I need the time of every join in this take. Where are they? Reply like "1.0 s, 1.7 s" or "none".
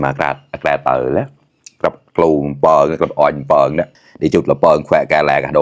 none